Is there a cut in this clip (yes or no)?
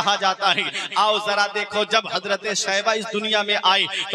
no